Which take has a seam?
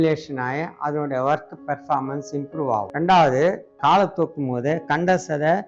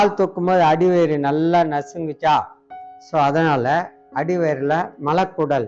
first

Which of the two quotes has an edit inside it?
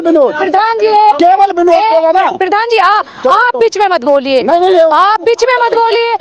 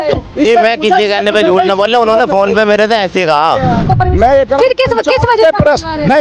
second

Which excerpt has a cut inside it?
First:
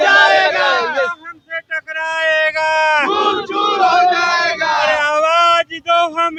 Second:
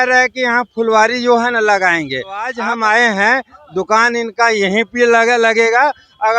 second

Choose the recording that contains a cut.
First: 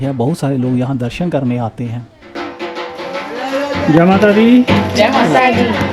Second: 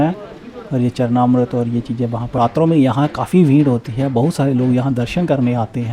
second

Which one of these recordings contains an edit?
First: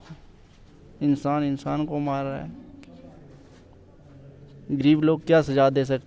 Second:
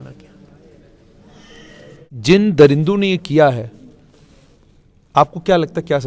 second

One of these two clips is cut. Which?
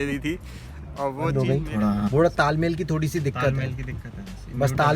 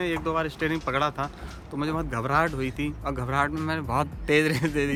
first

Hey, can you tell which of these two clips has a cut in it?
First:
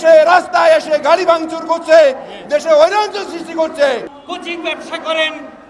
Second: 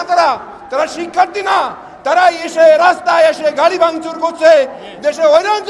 first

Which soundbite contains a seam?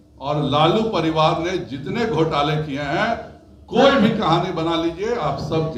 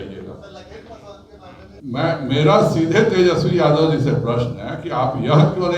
second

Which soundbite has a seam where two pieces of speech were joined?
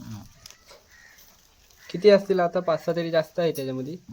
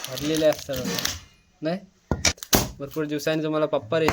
second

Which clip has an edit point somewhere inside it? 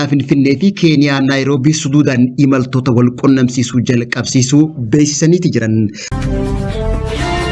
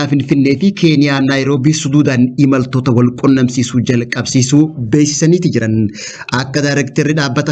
first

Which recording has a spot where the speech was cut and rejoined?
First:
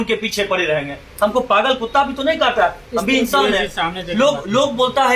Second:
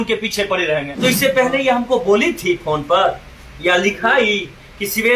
second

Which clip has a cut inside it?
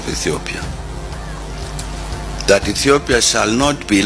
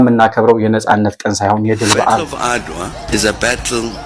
second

